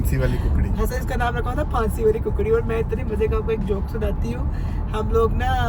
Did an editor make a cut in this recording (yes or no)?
no